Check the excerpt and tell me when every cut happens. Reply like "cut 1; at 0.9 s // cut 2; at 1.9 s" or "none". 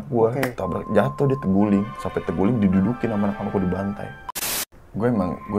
cut 1; at 4.4 s